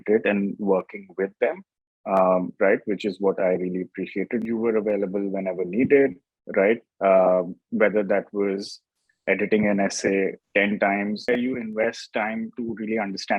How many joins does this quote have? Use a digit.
2